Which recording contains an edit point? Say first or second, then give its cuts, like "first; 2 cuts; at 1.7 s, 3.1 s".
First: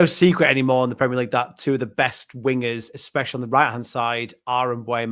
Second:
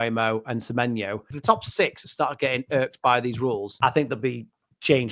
second; 2 cuts; at 1.3 s, 3.7 s